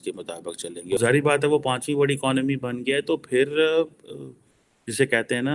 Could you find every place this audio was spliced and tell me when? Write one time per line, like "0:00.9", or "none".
0:01.0